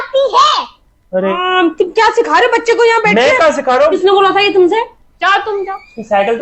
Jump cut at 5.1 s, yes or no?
yes